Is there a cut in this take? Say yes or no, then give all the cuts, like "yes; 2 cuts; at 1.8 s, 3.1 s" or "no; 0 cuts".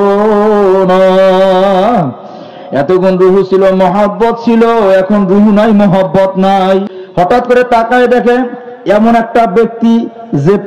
yes; 1 cut; at 7.0 s